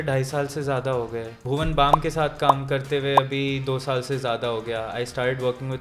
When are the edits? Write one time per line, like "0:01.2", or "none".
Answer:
0:01.4